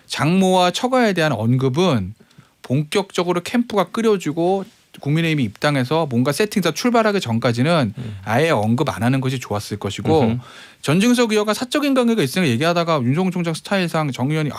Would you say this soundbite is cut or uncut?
uncut